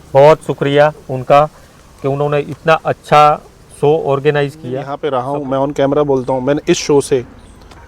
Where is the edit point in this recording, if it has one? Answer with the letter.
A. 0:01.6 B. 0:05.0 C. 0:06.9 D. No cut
B